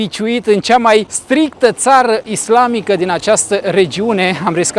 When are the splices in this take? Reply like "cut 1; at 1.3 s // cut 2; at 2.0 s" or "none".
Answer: cut 1; at 1.2 s // cut 2; at 2.3 s